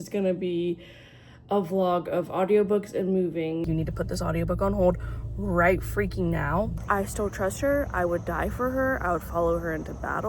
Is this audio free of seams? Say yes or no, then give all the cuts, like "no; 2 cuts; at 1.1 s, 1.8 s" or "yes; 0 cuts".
no; 2 cuts; at 3.6 s, 6.8 s